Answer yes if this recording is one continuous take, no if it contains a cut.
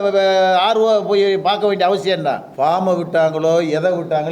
no